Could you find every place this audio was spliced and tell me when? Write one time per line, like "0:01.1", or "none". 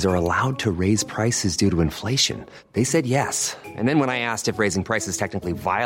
none